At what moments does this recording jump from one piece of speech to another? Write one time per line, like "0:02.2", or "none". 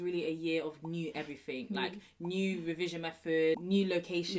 none